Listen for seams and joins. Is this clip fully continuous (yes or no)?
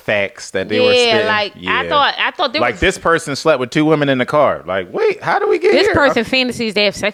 yes